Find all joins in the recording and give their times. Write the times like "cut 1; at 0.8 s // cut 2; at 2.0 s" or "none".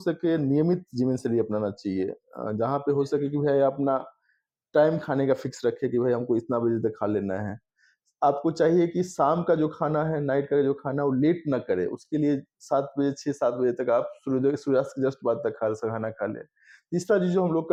none